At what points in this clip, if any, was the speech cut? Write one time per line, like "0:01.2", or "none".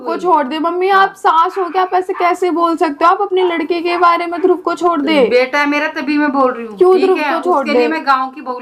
none